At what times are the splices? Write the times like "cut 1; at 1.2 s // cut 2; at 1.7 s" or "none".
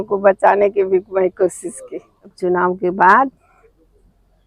cut 1; at 2.3 s